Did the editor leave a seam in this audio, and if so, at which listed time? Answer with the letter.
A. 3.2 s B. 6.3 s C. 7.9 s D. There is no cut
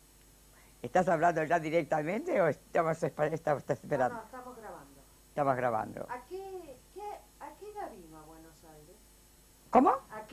D